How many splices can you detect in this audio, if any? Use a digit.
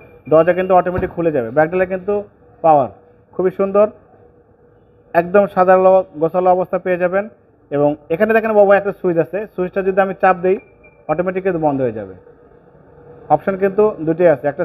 0